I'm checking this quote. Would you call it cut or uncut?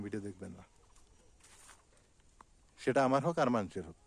uncut